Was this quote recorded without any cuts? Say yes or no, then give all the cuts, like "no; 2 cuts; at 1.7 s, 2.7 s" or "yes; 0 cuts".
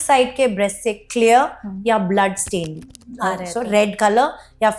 yes; 0 cuts